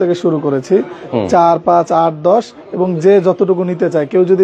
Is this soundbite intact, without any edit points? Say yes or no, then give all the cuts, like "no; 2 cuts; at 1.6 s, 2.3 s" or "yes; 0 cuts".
yes; 0 cuts